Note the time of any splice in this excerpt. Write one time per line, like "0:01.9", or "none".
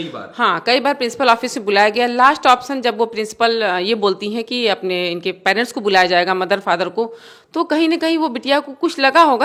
none

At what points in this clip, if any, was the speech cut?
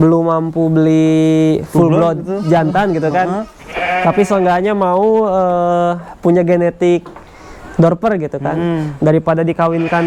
none

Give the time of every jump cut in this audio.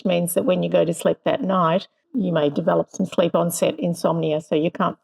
0:02.0

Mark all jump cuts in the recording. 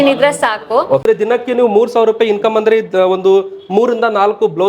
0:01.1

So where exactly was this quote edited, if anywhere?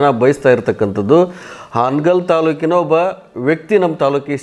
none

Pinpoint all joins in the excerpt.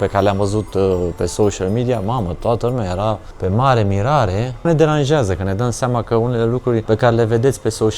0:03.3
0:04.7
0:06.8

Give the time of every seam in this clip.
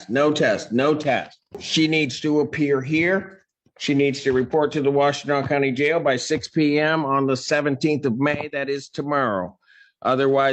0:01.4

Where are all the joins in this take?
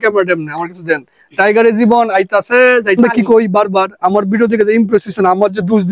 0:03.0

